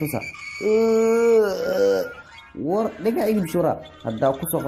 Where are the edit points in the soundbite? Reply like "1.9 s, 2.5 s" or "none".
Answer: none